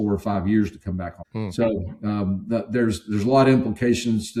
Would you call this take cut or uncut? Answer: uncut